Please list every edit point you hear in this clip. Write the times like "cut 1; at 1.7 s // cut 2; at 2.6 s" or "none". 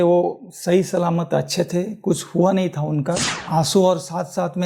cut 1; at 3.3 s